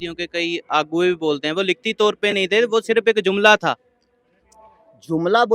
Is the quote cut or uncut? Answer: uncut